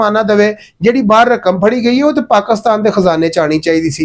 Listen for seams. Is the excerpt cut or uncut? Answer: uncut